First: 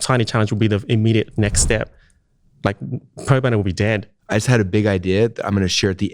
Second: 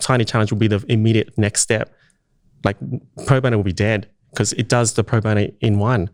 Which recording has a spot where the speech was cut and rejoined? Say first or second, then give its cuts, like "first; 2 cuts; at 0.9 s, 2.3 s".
first; 1 cut; at 4.1 s